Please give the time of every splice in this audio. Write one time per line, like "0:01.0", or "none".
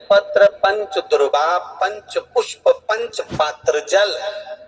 none